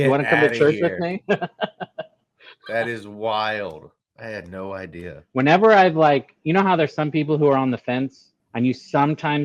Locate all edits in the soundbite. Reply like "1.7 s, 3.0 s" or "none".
5.2 s